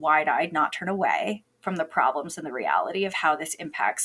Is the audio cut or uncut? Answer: uncut